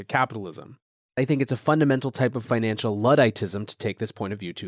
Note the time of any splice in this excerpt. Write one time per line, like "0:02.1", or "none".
0:01.2